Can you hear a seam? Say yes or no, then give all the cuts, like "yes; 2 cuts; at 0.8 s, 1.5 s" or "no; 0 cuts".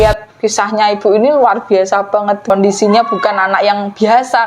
yes; 1 cut; at 2.5 s